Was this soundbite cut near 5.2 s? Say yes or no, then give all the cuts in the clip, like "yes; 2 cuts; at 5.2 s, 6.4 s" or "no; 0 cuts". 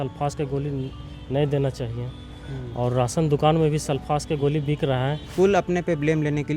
yes; 1 cut; at 5.2 s